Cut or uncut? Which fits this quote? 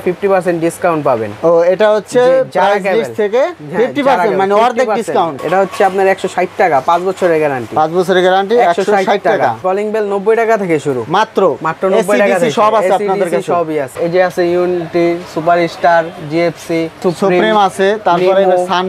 cut